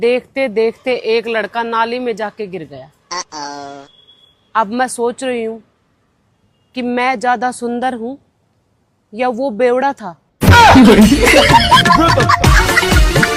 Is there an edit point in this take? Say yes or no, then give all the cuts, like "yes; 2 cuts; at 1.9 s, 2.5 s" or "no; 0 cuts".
no; 0 cuts